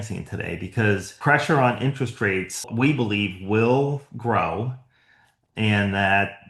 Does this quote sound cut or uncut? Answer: cut